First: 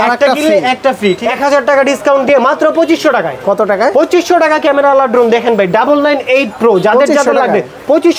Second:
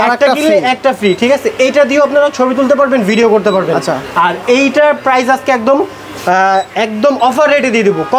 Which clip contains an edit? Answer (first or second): first